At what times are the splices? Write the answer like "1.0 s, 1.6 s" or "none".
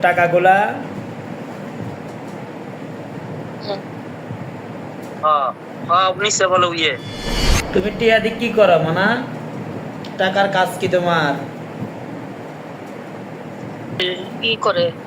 14.0 s

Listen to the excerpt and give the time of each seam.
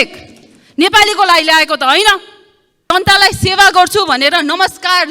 2.9 s

